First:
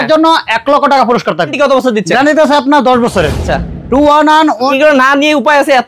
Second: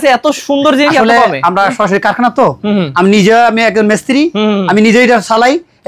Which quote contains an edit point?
first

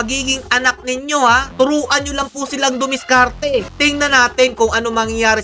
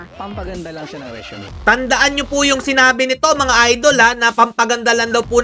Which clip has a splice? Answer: first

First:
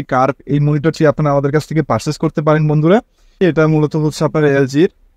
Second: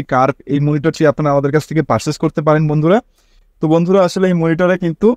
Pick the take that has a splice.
first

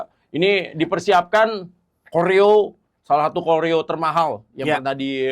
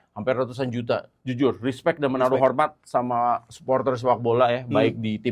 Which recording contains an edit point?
second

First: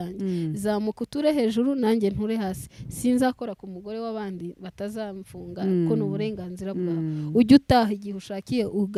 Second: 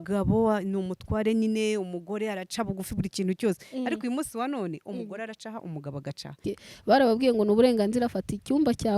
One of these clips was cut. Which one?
second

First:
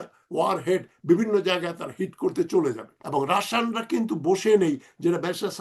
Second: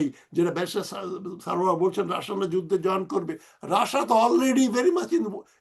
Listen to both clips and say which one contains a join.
first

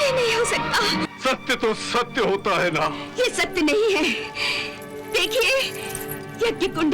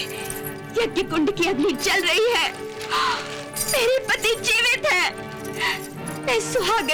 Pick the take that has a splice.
first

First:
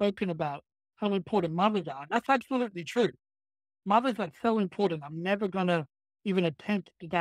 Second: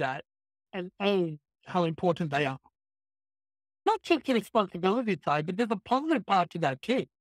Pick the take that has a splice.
second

